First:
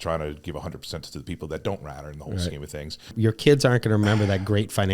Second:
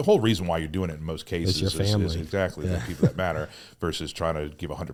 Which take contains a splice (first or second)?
first